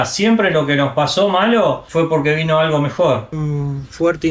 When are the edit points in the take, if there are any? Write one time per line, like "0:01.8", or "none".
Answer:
0:03.4